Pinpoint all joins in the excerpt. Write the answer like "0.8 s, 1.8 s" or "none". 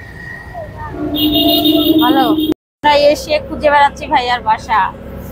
2.7 s